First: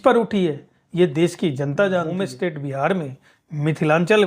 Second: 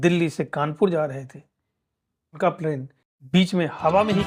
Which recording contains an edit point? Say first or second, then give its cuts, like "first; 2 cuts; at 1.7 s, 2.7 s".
first; 1 cut; at 2.2 s